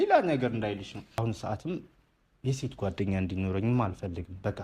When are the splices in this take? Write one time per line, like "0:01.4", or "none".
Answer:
0:01.2